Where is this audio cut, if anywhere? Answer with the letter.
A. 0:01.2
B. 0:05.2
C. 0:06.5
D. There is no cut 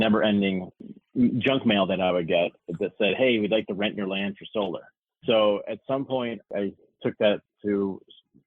C